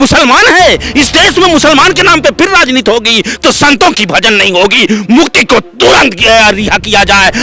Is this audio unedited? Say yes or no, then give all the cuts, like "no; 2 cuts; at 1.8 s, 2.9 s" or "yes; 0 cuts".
yes; 0 cuts